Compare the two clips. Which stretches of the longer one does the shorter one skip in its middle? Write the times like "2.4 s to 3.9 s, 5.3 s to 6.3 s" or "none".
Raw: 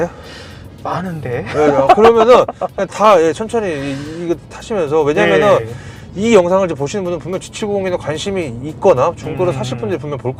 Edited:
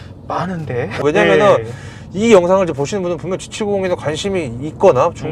1.6 s to 5.0 s